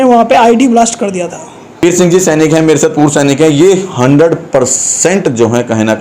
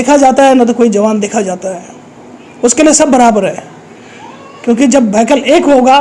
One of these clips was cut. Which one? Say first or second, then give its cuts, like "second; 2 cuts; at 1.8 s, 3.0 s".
first; 1 cut; at 1.8 s